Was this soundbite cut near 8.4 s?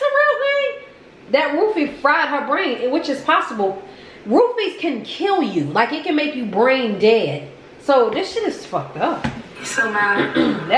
no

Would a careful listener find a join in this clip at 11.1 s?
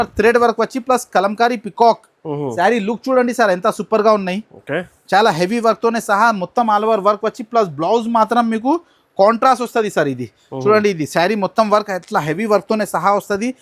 no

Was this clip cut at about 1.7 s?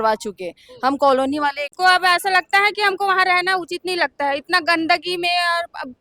yes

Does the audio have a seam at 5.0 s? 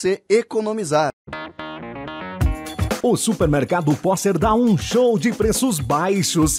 no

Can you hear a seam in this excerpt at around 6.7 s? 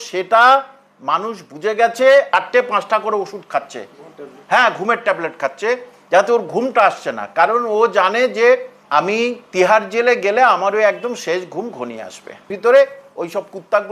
no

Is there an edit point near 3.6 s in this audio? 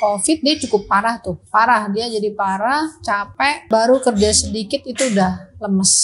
yes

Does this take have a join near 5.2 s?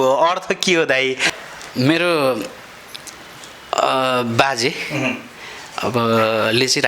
no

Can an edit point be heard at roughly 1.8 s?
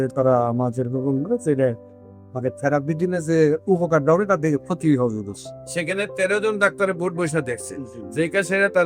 no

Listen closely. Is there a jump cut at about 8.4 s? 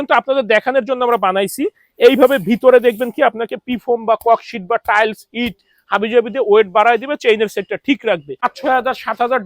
yes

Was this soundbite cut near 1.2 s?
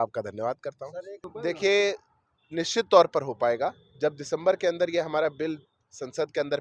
no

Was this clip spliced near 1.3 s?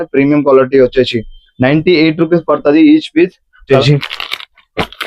no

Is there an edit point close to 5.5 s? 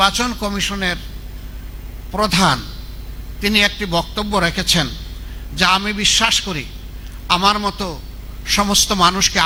no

